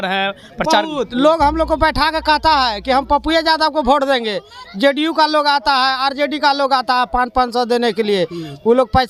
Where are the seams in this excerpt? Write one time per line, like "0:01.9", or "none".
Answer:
none